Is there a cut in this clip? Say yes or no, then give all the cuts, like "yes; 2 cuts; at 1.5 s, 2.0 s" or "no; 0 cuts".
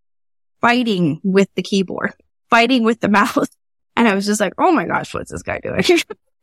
no; 0 cuts